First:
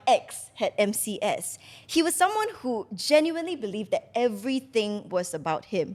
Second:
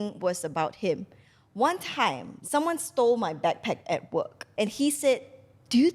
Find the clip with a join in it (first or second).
second